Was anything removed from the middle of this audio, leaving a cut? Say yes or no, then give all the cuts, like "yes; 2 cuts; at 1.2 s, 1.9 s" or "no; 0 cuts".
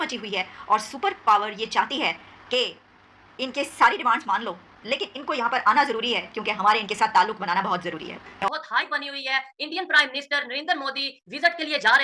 yes; 1 cut; at 8.4 s